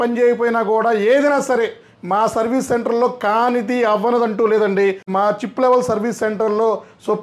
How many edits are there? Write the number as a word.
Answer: one